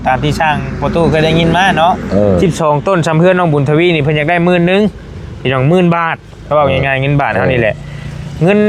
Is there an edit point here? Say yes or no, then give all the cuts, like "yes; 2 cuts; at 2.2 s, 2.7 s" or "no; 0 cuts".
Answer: no; 0 cuts